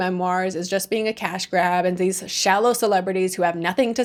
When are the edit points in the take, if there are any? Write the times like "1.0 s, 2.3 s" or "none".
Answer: none